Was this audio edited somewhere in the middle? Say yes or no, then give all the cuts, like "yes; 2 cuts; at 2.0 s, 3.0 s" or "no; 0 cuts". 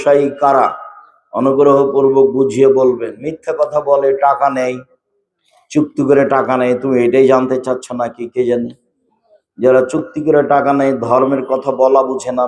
no; 0 cuts